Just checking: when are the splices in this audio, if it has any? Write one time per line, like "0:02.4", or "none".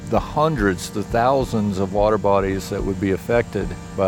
none